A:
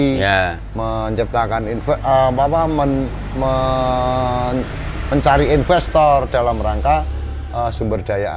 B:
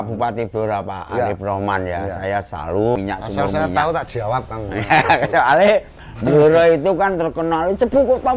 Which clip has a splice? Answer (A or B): B